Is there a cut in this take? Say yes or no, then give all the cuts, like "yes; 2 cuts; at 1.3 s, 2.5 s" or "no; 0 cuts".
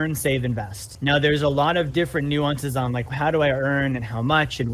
yes; 2 cuts; at 0.9 s, 3.1 s